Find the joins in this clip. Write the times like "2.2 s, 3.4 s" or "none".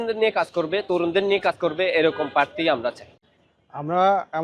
none